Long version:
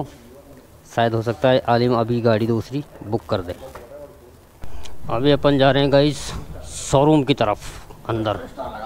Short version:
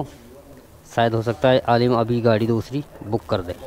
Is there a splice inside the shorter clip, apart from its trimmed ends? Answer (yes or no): no